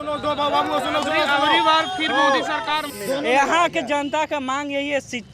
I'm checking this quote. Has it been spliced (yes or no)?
yes